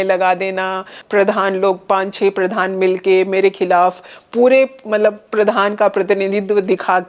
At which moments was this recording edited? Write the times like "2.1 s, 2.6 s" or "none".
0.9 s